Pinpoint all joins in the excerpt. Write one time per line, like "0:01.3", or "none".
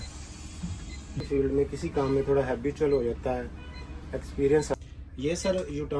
0:01.2
0:04.7